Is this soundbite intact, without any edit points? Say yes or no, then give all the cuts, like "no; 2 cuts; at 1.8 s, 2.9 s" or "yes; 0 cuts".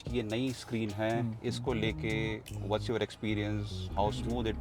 yes; 0 cuts